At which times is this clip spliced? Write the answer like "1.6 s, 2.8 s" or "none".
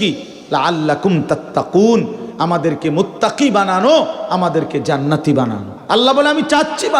5.7 s